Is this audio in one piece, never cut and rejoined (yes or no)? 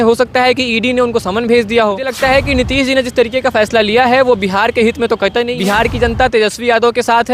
no